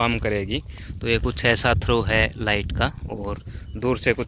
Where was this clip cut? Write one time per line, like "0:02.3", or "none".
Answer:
none